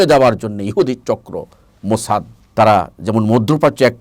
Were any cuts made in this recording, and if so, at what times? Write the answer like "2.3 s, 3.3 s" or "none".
2.4 s